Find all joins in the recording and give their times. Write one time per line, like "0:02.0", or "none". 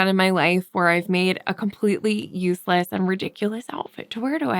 none